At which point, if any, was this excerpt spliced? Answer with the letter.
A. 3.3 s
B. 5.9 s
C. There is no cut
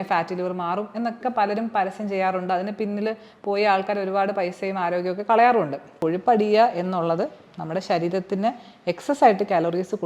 B